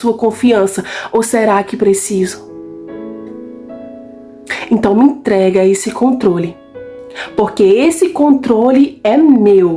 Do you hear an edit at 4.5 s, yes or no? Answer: yes